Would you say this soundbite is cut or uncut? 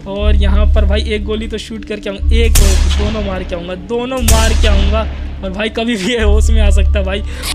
uncut